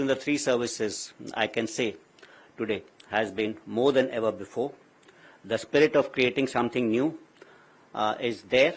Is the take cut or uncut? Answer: uncut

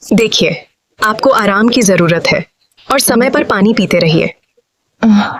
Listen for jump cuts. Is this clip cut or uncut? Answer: uncut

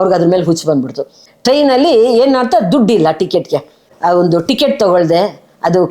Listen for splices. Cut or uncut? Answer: cut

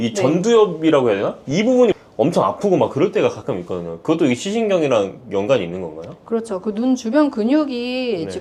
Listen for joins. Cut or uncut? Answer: uncut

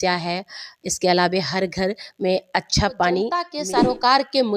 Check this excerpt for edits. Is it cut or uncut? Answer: cut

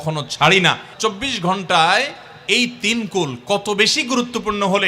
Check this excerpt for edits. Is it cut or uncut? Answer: cut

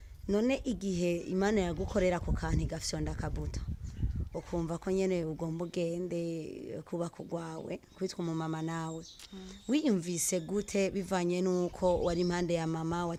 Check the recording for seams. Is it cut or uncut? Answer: uncut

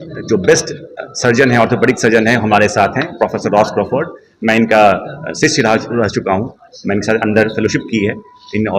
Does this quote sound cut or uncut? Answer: uncut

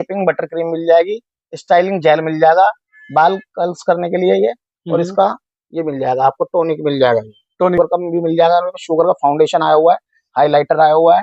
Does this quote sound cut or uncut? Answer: cut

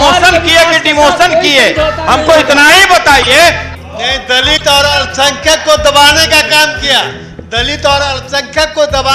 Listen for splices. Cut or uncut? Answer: cut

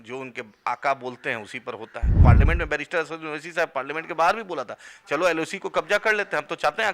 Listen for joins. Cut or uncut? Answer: cut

